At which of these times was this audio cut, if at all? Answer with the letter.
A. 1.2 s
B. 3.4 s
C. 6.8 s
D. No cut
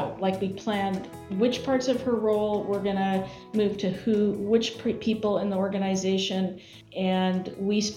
C